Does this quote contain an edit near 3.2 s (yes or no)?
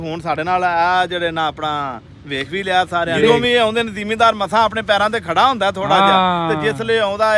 yes